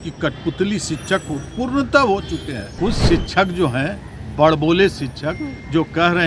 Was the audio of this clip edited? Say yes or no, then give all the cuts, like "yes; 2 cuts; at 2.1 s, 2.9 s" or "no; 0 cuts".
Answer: yes; 1 cut; at 2.7 s